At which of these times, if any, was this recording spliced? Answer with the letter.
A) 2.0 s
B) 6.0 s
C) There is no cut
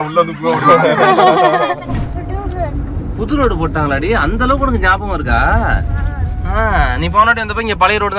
A